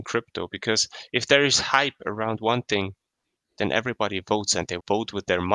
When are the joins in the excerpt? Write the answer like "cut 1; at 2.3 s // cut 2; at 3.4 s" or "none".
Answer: none